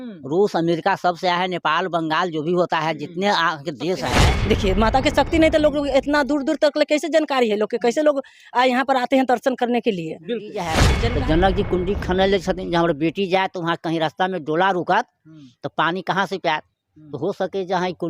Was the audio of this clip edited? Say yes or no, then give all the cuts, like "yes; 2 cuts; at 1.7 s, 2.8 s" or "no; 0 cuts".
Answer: yes; 2 cuts; at 4.3 s, 10.9 s